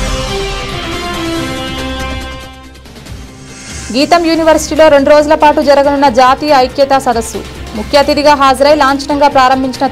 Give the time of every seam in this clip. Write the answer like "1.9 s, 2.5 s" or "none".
3.0 s